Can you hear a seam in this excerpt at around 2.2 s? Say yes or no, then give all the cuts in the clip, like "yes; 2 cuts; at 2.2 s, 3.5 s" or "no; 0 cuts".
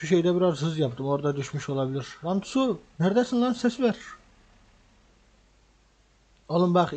yes; 1 cut; at 2.2 s